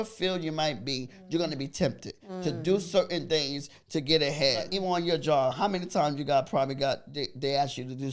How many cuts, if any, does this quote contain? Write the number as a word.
zero